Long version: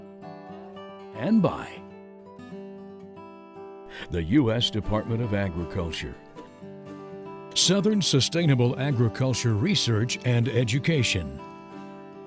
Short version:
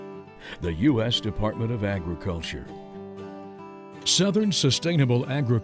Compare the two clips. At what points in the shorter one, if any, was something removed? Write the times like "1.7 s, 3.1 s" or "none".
none